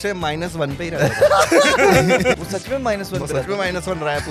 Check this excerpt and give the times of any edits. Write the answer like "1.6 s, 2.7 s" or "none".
2.4 s